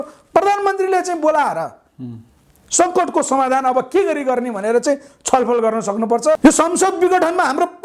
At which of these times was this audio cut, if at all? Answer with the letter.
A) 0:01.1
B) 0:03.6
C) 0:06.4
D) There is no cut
C